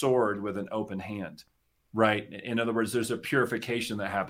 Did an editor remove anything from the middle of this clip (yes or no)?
no